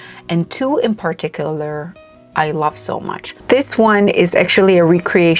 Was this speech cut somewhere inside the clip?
yes; 1 cut; at 3.3 s

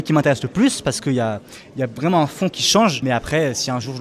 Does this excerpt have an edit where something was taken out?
yes; 1 cut; at 3.0 s

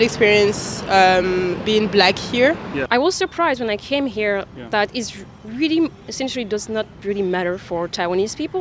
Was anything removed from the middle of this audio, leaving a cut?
yes; 1 cut; at 2.8 s

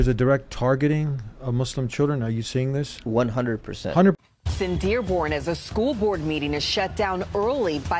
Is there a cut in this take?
yes; 1 cut; at 4.2 s

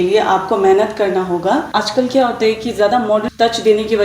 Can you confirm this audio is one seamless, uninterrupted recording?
no; 2 cuts; at 1.8 s, 3.2 s

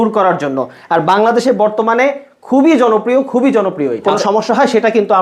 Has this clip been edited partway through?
yes; 1 cut; at 4.0 s

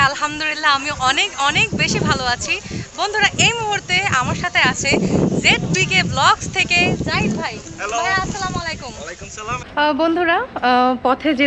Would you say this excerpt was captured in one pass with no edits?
no; 1 cut; at 9.7 s

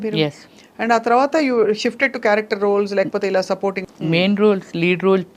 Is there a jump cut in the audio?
yes; 1 cut; at 3.8 s

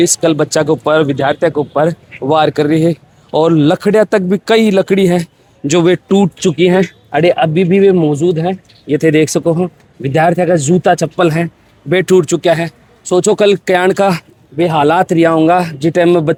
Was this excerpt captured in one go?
yes; 0 cuts

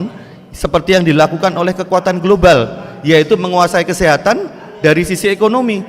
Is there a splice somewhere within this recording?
no; 0 cuts

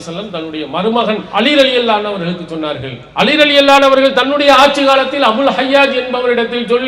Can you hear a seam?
yes; 2 cuts; at 1.2 s, 3.0 s

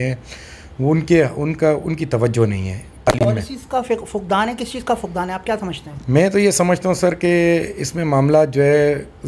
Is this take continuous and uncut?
yes; 0 cuts

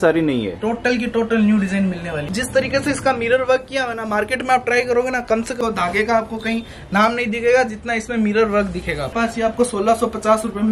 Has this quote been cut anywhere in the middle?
yes; 3 cuts; at 2.3 s, 5.6 s, 9.1 s

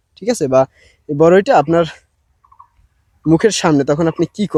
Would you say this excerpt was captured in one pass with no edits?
yes; 0 cuts

